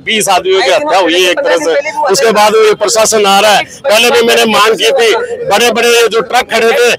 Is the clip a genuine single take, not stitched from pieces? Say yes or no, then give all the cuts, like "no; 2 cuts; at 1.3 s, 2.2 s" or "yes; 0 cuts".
yes; 0 cuts